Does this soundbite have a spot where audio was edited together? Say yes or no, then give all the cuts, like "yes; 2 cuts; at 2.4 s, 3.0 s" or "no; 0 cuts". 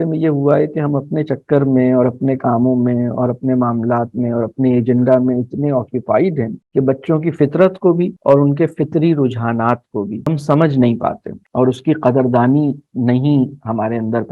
no; 0 cuts